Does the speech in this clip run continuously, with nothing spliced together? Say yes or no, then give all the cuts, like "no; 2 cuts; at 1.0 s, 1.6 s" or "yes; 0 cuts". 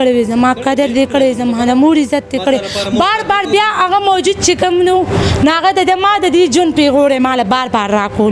yes; 0 cuts